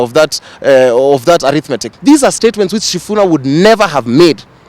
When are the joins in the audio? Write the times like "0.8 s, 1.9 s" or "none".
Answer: 1.8 s

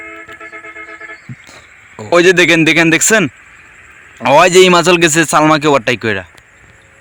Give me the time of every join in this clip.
none

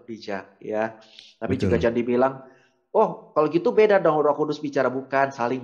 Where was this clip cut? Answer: none

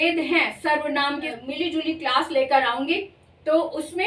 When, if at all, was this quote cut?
1.3 s

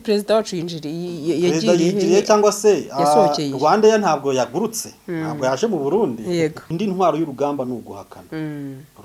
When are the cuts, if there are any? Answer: 6.7 s

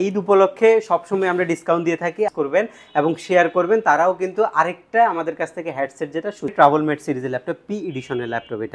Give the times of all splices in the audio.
2.3 s, 6.5 s

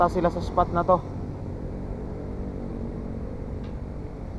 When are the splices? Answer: none

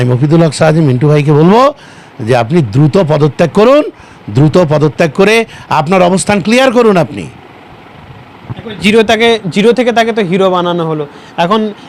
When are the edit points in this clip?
none

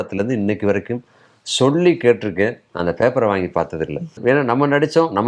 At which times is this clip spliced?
4.2 s

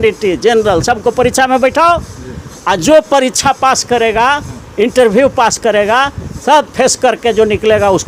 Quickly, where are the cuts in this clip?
none

